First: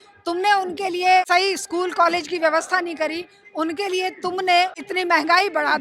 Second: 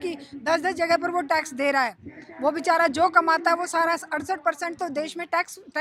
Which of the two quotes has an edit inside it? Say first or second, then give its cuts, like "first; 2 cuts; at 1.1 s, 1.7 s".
first; 2 cuts; at 1.3 s, 4.8 s